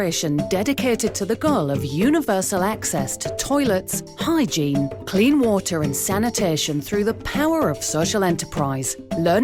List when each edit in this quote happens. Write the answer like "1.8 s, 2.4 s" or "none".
none